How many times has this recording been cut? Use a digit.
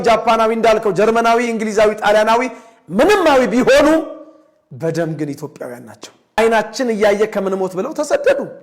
1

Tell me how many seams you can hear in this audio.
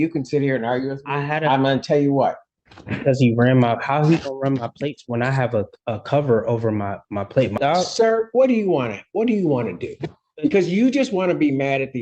2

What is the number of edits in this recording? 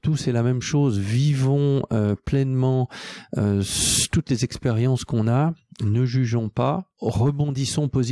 1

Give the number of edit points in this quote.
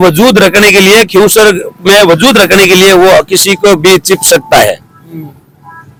0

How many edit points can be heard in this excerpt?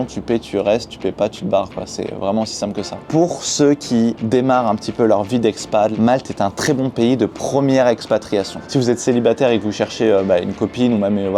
3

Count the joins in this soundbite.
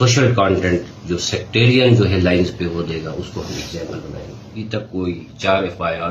1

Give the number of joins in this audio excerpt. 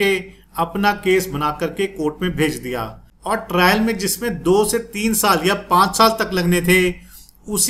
1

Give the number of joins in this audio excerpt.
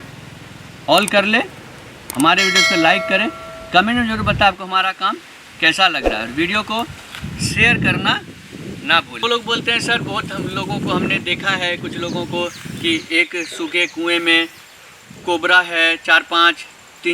1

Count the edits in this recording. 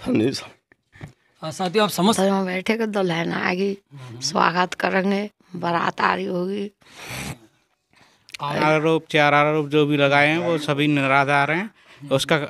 2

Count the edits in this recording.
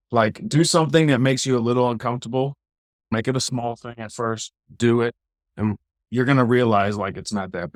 0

